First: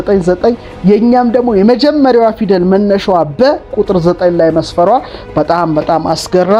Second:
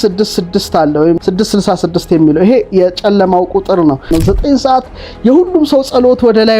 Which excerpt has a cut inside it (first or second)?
second